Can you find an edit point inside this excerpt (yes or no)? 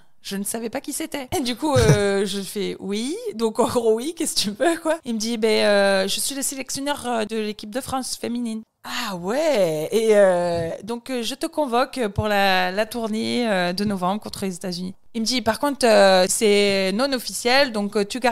yes